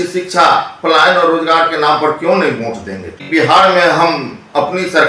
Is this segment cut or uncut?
cut